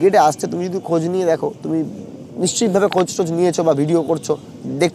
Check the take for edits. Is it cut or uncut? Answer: uncut